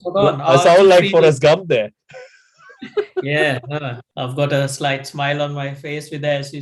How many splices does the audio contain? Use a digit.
1